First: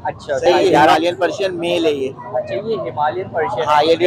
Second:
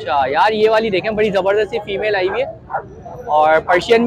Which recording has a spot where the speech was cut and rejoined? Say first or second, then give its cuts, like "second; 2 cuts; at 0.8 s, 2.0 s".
first; 1 cut; at 0.9 s